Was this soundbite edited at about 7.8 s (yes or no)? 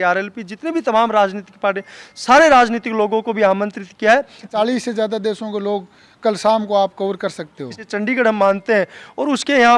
yes